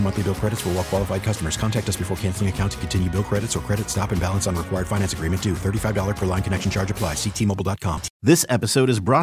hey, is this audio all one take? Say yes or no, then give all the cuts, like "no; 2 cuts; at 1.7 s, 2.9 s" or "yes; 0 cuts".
no; 1 cut; at 8.1 s